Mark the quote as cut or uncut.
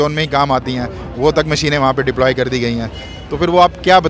uncut